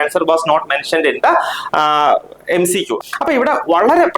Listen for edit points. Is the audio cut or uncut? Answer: cut